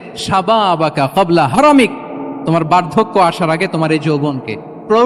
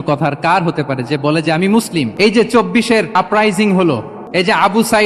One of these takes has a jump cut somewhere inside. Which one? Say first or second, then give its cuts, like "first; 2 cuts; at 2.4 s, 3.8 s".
second; 3 cuts; at 2.1 s, 3.1 s, 4.1 s